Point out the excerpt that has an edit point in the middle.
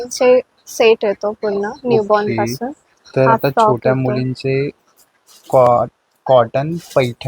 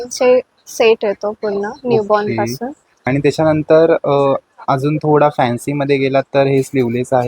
second; 1 cut; at 3.1 s

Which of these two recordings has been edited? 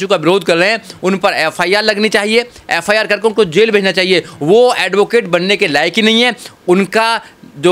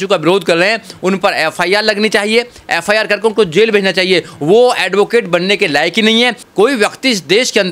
second; 1 cut; at 6.4 s

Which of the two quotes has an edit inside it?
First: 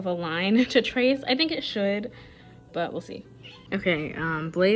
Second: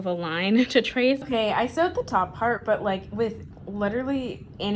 second; 1 cut; at 1.2 s

